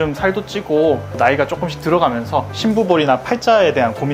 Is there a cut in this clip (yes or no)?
no